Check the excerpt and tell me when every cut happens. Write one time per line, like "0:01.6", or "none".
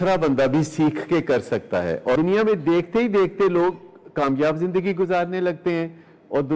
0:02.1